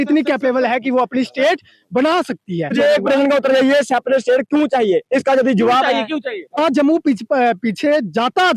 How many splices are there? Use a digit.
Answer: 2